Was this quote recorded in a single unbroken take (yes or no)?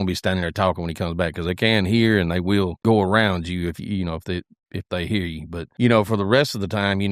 no